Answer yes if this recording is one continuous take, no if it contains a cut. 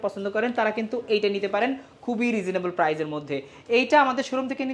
yes